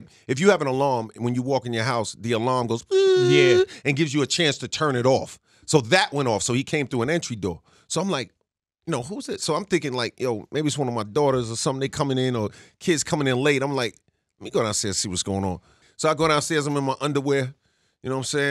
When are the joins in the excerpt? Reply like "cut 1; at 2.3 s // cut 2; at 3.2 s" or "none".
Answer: cut 1; at 15.8 s